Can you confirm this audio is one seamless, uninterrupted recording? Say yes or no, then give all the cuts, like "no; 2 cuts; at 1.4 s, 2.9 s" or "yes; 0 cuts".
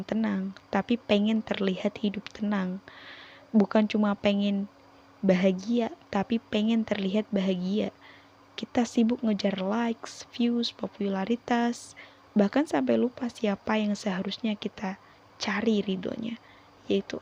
yes; 0 cuts